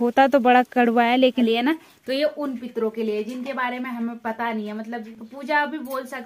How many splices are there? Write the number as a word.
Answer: two